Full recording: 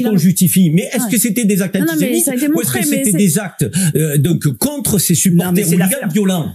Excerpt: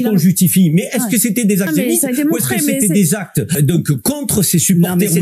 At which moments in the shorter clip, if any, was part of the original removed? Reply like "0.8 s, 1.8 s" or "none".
1.7 s, 3.5 s